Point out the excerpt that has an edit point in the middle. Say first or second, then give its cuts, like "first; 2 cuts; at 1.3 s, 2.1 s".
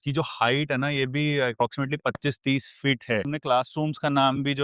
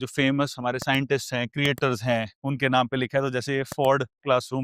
first; 1 cut; at 3.3 s